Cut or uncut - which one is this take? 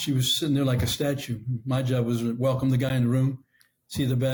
uncut